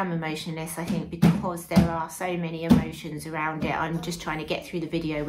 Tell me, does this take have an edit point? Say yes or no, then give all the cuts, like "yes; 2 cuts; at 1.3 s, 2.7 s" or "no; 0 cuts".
no; 0 cuts